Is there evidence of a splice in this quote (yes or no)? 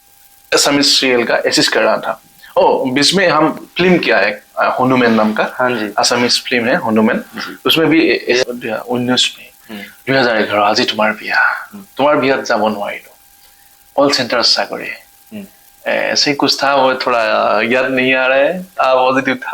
yes